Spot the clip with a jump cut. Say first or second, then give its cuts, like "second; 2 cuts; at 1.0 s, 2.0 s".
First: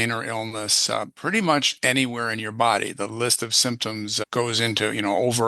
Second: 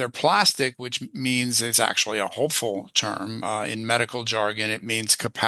first; 1 cut; at 4.2 s